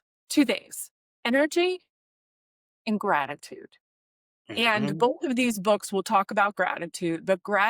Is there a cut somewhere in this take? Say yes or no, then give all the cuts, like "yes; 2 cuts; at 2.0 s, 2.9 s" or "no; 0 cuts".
no; 0 cuts